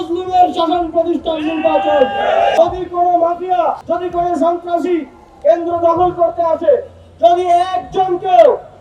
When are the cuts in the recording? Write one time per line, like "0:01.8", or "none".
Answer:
0:02.5